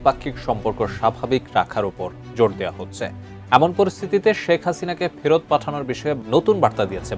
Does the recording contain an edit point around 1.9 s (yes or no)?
no